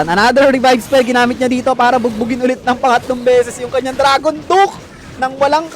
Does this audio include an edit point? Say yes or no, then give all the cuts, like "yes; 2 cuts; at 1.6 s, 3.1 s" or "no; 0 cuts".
no; 0 cuts